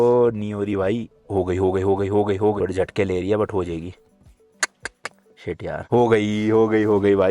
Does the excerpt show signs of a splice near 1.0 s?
no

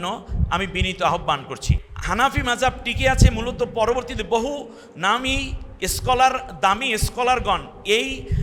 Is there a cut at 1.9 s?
yes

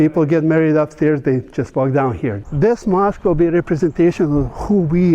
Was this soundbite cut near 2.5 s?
yes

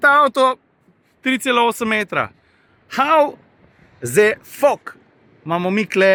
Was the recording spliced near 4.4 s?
no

